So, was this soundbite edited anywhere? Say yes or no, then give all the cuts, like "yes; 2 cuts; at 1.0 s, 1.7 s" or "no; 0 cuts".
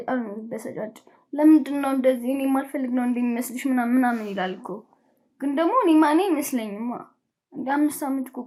no; 0 cuts